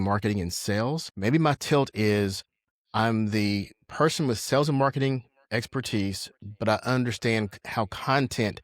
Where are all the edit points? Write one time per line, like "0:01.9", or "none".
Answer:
0:01.1